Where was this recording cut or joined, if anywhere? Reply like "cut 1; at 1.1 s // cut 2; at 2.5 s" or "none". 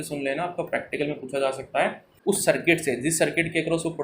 cut 1; at 2.1 s

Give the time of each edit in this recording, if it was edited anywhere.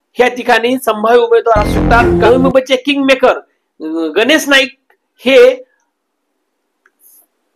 cut 1; at 2.1 s

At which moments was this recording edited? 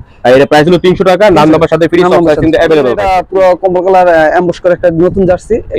cut 1; at 3.1 s

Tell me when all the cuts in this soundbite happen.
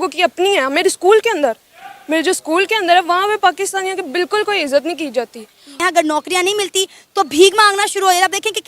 cut 1; at 5.7 s

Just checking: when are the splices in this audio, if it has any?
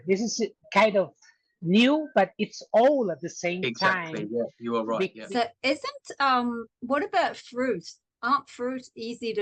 cut 1; at 5.2 s

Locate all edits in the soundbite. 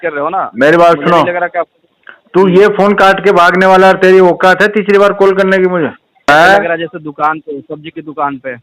cut 1; at 6.3 s

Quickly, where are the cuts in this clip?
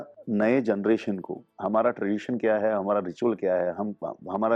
none

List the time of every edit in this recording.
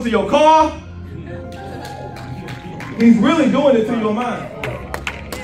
cut 1; at 4.3 s

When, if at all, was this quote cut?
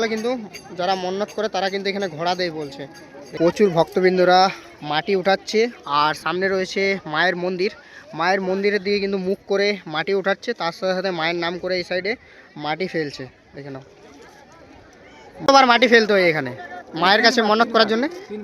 cut 1; at 3.3 s // cut 2; at 15.4 s

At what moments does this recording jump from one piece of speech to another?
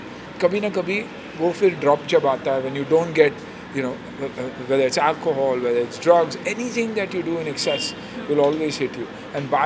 none

